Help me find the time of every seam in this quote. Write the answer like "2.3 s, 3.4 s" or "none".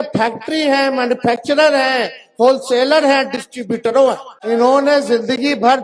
4.3 s